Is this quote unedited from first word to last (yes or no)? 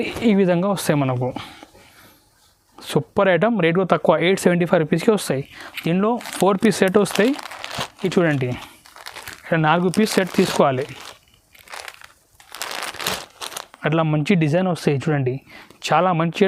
yes